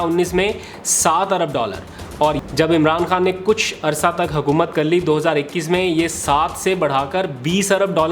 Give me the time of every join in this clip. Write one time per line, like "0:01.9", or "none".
0:02.4